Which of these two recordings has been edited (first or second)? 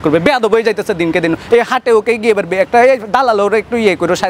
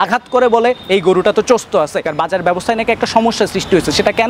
second